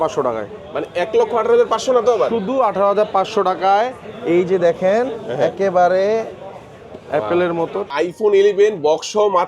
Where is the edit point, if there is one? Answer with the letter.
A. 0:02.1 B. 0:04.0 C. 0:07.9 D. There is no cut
C